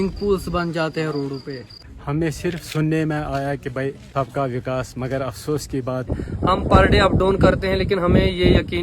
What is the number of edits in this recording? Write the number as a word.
two